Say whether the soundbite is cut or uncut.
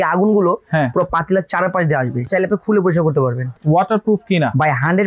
cut